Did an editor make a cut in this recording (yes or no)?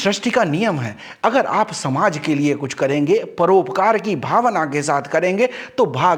no